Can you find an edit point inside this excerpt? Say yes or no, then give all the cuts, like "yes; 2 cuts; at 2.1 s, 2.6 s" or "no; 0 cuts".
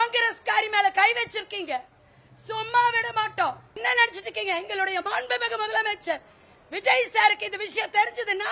yes; 1 cut; at 3.8 s